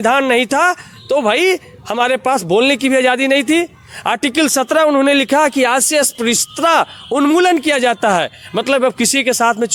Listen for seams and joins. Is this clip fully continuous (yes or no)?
yes